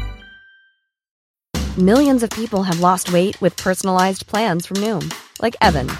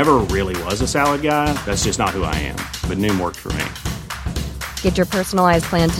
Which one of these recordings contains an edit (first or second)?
first